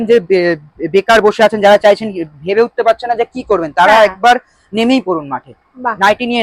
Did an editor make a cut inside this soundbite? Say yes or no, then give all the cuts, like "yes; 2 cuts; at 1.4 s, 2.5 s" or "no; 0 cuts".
no; 0 cuts